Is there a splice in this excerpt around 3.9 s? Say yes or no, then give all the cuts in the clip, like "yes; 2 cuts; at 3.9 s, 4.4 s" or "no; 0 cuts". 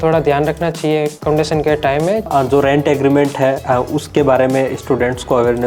no; 2 cuts; at 1.2 s, 2.3 s